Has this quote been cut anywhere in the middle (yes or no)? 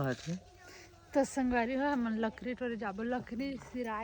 no